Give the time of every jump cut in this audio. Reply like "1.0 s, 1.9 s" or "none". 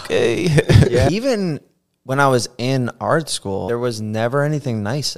1.1 s, 3.7 s